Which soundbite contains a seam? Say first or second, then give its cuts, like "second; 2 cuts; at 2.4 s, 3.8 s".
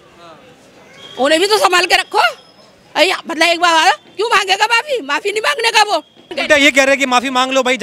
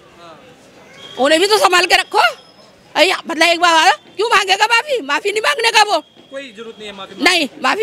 first; 1 cut; at 6.3 s